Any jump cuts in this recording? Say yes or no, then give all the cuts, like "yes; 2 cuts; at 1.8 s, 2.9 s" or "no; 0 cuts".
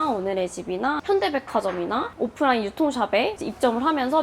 yes; 1 cut; at 1.0 s